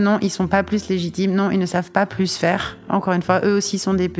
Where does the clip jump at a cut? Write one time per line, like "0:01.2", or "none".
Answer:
none